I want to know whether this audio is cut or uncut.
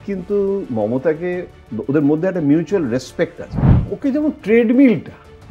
cut